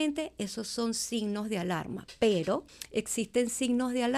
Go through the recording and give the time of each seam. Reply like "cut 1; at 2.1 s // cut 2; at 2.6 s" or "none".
cut 1; at 2.0 s // cut 2; at 2.8 s

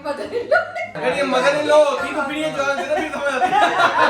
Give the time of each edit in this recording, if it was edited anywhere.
cut 1; at 0.9 s

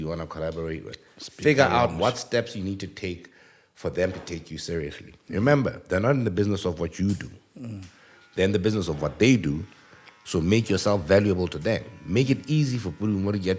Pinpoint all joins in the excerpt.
none

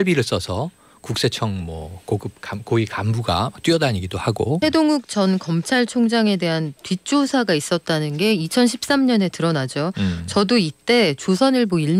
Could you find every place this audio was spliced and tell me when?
cut 1; at 4.6 s

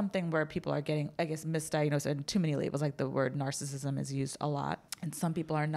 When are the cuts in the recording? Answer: cut 1; at 1.1 s // cut 2; at 4.8 s

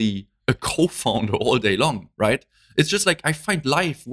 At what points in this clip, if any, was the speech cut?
none

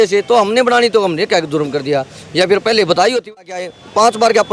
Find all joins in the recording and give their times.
cut 1; at 3.3 s

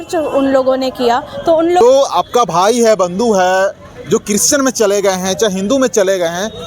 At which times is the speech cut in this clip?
cut 1; at 1.8 s

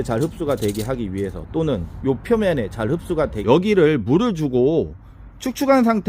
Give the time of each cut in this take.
cut 1; at 3.4 s

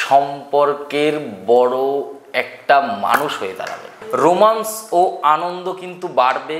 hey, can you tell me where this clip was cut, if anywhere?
cut 1; at 4.0 s

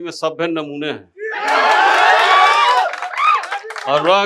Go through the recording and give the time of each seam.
none

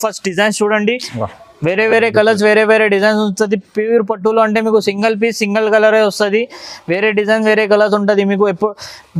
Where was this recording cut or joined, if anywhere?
none

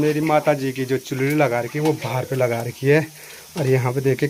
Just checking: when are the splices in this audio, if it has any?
none

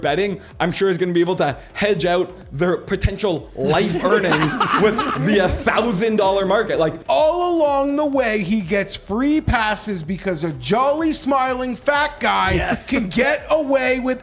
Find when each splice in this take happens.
cut 1; at 7.0 s

